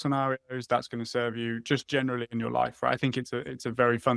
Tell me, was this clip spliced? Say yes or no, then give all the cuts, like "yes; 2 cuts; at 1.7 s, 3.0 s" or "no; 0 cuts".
no; 0 cuts